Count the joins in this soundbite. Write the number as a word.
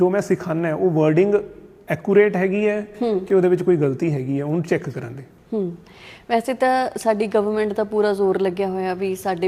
zero